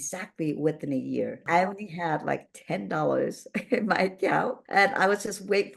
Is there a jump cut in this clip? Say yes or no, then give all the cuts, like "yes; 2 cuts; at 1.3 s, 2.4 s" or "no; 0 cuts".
yes; 2 cuts; at 1.4 s, 4.6 s